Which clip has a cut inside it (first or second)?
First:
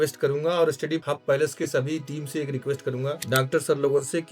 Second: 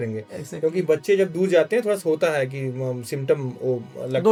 first